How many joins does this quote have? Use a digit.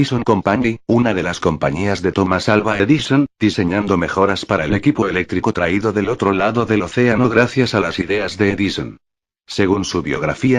0